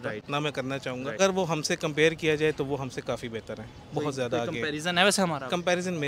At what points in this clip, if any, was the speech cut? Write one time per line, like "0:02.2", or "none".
0:01.2